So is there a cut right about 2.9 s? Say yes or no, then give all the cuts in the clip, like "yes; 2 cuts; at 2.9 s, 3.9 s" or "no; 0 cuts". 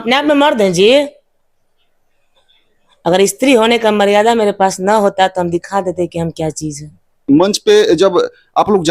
no; 1 cut; at 7.2 s